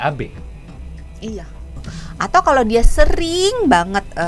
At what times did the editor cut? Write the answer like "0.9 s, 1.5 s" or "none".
1.8 s